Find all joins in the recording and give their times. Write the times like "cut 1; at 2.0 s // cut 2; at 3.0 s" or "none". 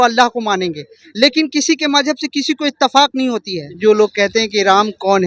cut 1; at 3.7 s